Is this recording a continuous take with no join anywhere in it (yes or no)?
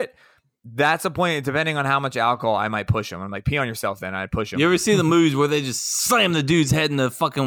no